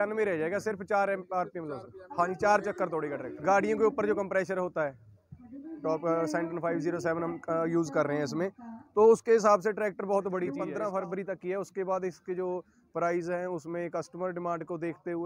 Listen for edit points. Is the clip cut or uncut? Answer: cut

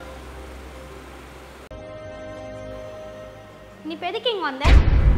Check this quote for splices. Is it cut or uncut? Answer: cut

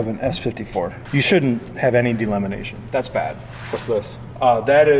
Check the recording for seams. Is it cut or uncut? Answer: cut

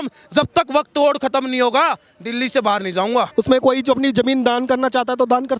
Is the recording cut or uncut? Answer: cut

